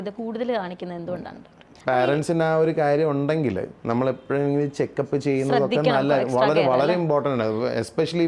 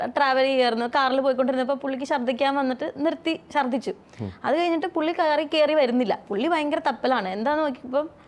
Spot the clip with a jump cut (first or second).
first